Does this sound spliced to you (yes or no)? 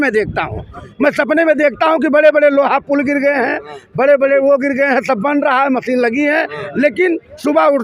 no